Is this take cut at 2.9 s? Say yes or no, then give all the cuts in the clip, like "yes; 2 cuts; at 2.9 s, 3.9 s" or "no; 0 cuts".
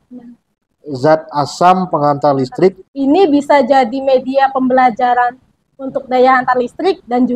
yes; 1 cut; at 2.9 s